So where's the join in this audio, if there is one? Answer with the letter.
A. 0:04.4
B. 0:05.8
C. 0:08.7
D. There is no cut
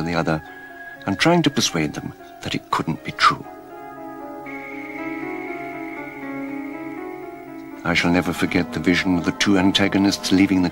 B